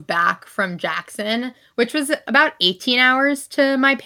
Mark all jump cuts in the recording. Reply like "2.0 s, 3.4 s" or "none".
none